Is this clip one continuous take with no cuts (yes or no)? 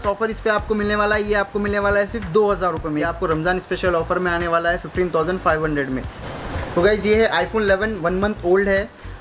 no